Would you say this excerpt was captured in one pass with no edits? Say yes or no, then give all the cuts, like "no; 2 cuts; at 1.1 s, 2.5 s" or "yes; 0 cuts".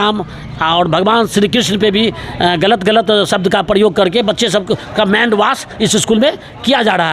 yes; 0 cuts